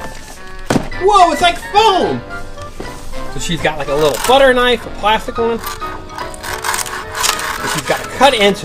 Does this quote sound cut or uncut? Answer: cut